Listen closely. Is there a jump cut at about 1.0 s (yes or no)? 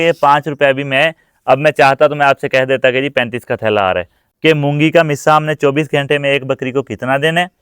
no